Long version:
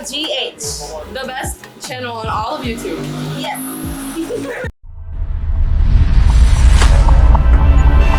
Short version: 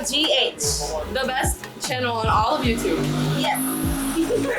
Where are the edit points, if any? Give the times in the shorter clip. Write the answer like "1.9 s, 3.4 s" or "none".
none